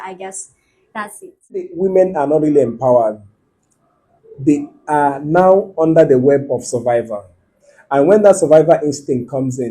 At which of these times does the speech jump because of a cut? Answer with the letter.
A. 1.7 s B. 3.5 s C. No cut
A